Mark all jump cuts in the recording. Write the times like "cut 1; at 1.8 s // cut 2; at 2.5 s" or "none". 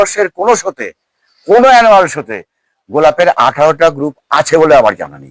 none

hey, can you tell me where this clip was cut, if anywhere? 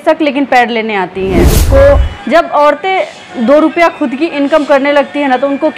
cut 1; at 1.5 s

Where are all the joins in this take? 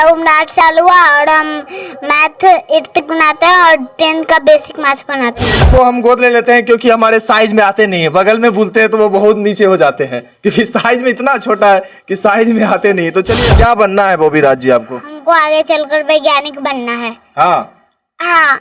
cut 1; at 5.6 s // cut 2; at 13.4 s

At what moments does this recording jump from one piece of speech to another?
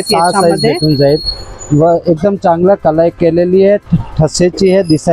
none

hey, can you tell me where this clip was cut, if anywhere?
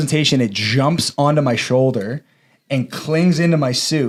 none

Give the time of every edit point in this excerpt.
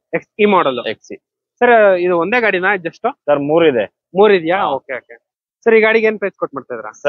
none

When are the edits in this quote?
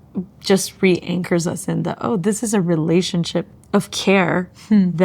cut 1; at 3.6 s

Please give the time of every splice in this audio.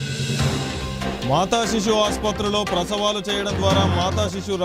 cut 1; at 1.2 s

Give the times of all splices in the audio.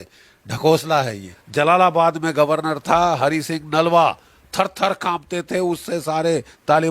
cut 1; at 1.4 s

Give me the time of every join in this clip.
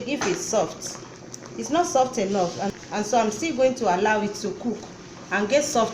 cut 1; at 2.7 s

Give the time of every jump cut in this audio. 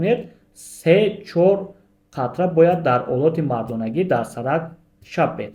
none

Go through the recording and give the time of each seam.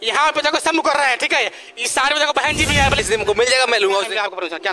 cut 1; at 3.0 s

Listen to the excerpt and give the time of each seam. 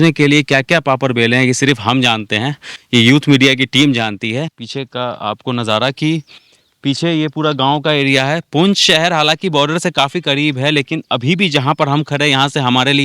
cut 1; at 4.6 s

